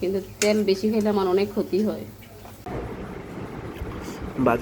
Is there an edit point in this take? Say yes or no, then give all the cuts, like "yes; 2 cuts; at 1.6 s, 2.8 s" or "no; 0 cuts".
yes; 1 cut; at 2.6 s